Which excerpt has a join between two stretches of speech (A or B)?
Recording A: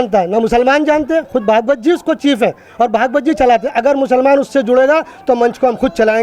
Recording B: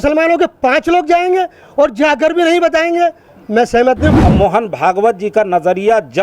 B